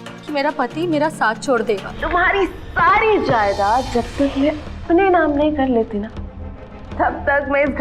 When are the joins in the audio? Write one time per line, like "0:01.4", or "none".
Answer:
0:01.9